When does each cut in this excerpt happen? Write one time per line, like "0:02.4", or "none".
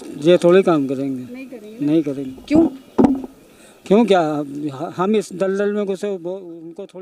none